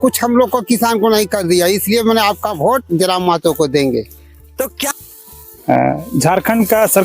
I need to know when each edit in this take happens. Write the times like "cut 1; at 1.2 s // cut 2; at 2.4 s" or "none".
cut 1; at 4.9 s